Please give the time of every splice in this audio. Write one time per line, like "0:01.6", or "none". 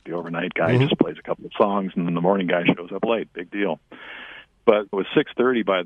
0:04.9